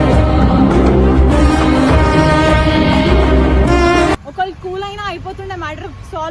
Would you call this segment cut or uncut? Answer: uncut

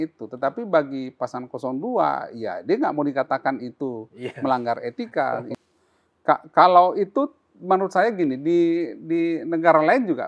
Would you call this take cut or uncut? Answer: cut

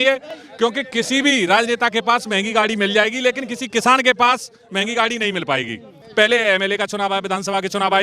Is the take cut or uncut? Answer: cut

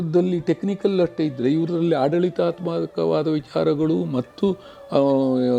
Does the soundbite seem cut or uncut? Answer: uncut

